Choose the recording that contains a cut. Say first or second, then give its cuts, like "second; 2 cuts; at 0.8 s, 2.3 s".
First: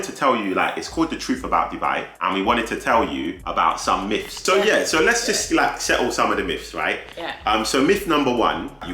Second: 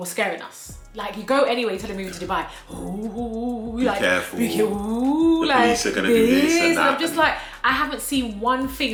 first; 3 cuts; at 2.1 s, 3.4 s, 4.5 s